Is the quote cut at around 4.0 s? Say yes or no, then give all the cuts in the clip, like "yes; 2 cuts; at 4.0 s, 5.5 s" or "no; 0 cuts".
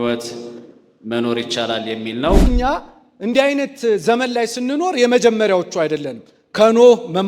no; 1 cut; at 2.5 s